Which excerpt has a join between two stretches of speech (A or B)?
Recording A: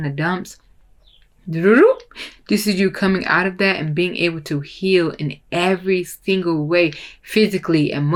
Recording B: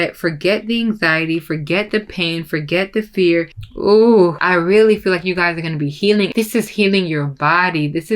B